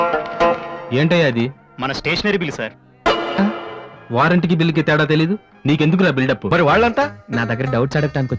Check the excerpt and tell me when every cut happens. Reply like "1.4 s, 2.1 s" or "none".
6.4 s